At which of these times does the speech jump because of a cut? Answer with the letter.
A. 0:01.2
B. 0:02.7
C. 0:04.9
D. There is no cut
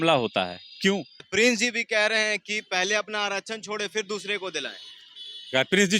A